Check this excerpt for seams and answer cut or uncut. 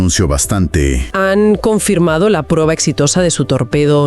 cut